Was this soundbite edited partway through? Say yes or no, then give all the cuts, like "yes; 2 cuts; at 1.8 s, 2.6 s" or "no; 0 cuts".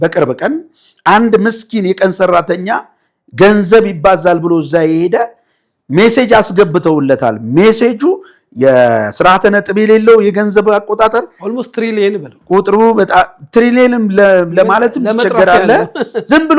no; 0 cuts